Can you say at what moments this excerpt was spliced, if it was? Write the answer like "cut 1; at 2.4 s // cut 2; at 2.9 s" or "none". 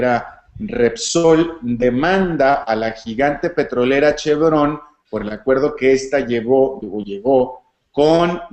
cut 1; at 2.0 s